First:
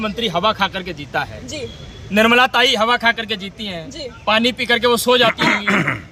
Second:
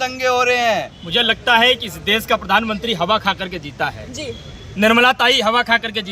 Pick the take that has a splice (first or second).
second